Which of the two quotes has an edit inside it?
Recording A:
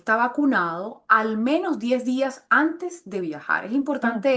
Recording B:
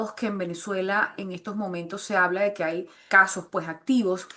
B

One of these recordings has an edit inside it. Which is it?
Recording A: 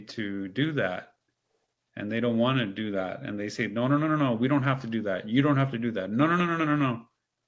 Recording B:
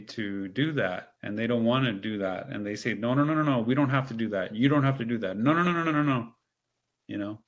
B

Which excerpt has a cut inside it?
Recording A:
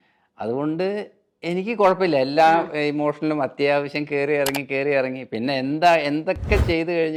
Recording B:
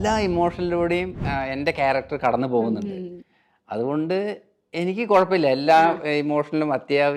B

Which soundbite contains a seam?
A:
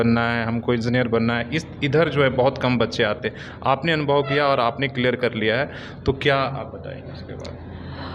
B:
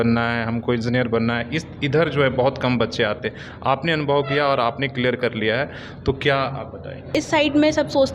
B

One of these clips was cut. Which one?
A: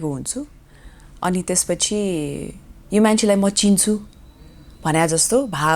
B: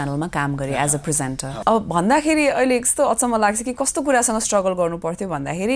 B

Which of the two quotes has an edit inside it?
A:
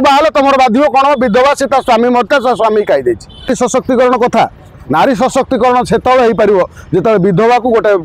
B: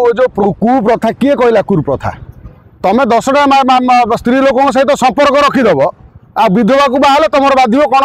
A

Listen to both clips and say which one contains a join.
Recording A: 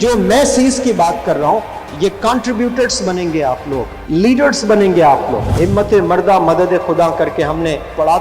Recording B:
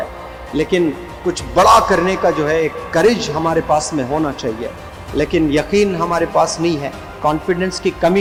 A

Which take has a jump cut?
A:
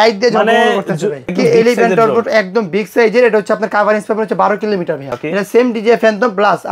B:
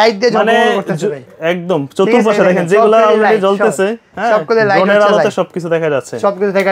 A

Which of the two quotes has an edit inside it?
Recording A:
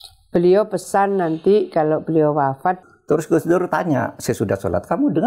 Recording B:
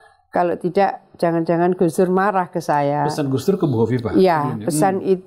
A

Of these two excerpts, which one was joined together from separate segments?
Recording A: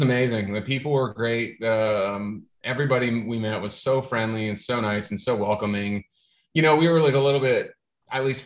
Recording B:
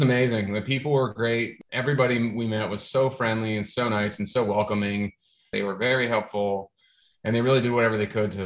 B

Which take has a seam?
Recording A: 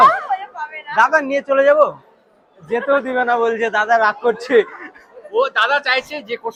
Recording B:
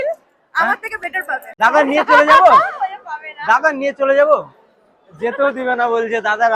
B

